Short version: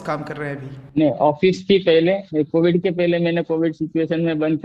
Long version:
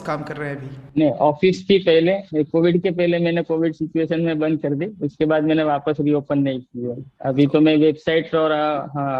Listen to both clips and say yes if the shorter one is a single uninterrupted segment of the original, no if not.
yes